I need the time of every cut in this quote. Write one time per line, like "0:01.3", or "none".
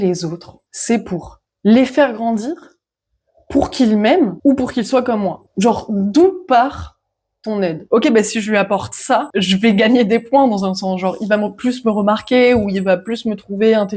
0:05.4
0:07.9